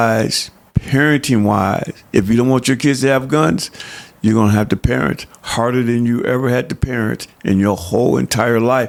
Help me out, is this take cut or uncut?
uncut